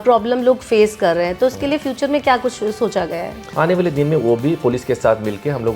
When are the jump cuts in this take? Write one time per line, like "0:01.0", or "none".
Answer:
0:03.5